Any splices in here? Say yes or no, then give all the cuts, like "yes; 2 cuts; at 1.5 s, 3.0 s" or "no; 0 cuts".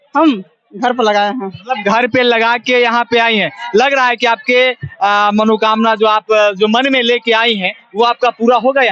no; 0 cuts